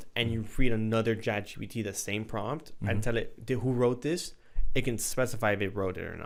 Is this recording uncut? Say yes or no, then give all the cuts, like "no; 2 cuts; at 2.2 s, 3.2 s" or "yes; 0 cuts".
yes; 0 cuts